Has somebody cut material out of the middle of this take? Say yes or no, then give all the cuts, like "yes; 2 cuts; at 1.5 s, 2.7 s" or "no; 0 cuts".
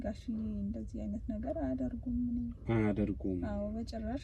no; 0 cuts